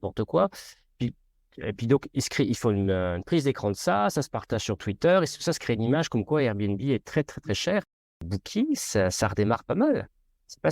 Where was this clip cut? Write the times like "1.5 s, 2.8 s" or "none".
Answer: 8.3 s